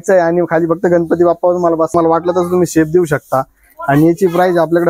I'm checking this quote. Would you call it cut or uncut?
cut